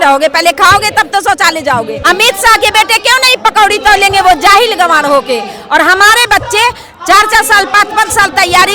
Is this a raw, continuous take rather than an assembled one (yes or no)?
no